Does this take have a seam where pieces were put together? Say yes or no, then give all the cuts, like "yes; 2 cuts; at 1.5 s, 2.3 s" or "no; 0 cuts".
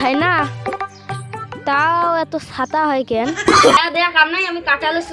yes; 1 cut; at 3.8 s